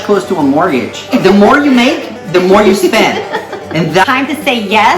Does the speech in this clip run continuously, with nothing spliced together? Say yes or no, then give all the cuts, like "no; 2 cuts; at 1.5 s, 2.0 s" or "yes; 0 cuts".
no; 2 cuts; at 1.1 s, 4.0 s